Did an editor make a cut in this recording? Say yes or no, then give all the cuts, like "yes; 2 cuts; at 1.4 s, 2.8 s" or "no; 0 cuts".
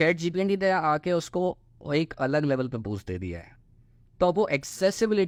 no; 0 cuts